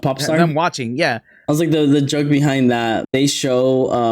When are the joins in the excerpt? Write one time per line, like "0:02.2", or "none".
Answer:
0:01.3
0:03.0

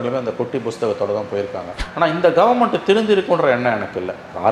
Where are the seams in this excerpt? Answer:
0:01.7

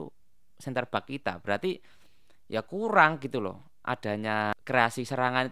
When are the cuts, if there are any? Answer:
0:04.5

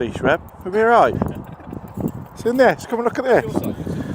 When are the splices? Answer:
none

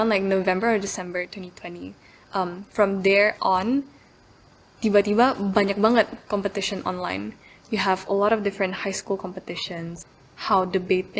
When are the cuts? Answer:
0:10.0

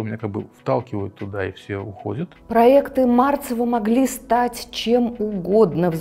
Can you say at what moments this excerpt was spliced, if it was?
0:02.3

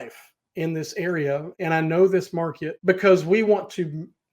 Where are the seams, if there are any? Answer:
0:01.5
0:02.7

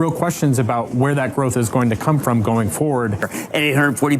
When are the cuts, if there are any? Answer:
0:03.3

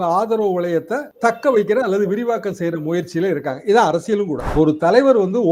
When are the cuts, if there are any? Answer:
0:04.4

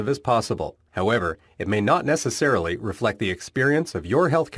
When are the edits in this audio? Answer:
none

